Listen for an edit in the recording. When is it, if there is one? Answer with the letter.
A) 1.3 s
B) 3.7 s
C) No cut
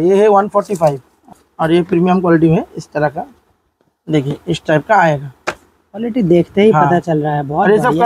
A